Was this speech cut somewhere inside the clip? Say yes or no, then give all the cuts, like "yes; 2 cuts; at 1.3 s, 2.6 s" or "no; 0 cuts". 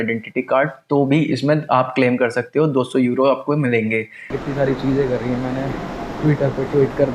yes; 1 cut; at 4.3 s